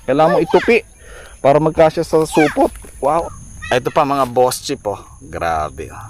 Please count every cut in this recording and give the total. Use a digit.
1